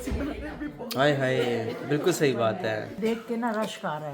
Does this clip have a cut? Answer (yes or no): yes